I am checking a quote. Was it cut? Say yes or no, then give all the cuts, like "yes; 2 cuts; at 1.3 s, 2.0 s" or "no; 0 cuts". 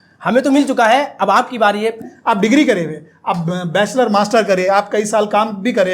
yes; 1 cut; at 2.1 s